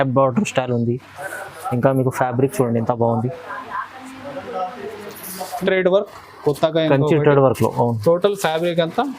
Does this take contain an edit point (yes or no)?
yes